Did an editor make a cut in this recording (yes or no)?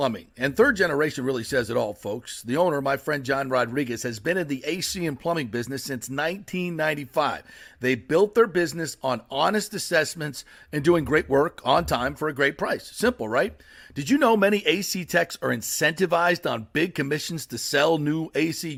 no